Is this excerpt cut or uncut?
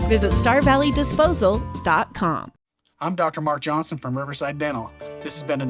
cut